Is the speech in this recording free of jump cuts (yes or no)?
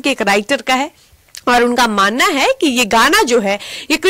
no